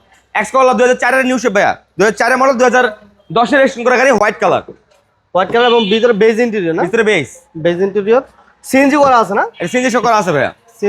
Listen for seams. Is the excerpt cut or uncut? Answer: uncut